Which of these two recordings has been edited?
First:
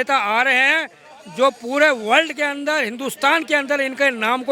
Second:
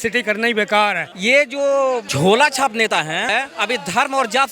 second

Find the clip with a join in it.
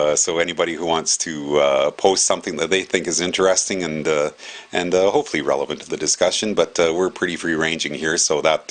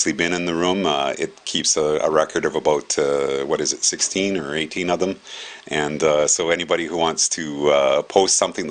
second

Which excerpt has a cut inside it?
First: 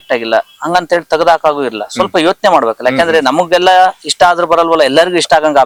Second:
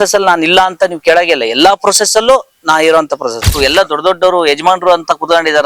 second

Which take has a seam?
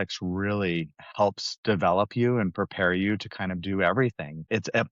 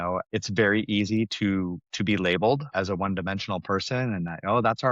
first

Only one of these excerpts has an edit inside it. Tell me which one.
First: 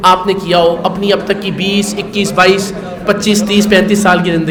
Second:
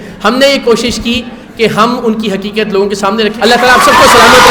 second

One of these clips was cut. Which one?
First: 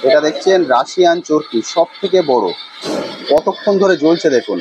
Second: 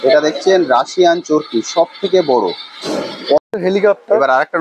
second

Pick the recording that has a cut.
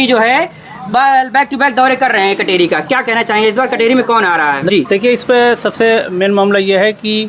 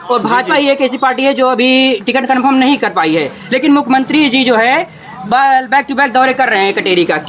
first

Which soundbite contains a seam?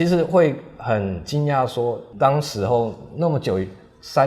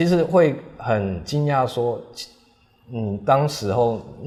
first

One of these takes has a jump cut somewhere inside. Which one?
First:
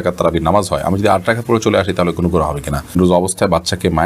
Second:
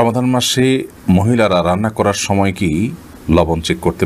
first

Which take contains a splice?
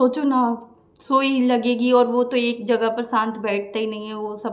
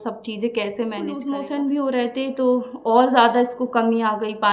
second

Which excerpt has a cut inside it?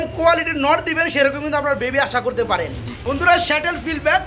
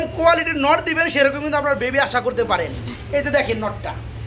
first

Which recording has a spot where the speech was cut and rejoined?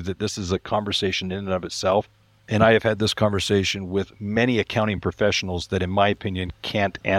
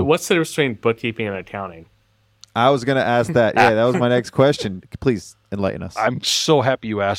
second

